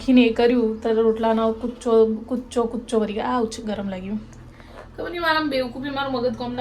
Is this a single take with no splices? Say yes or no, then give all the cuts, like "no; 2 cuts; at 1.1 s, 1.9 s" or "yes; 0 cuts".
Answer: yes; 0 cuts